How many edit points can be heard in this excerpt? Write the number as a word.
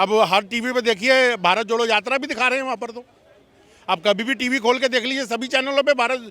zero